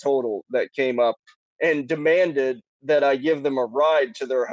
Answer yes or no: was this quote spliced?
no